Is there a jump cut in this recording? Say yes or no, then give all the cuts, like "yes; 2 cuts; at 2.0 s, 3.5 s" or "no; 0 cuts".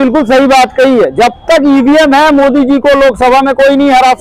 no; 0 cuts